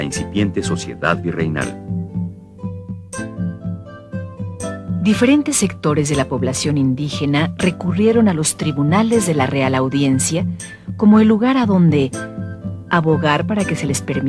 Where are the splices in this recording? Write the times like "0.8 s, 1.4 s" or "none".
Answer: 5.3 s